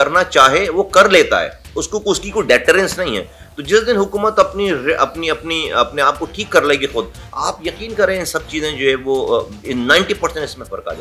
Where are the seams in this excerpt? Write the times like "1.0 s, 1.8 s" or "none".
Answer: none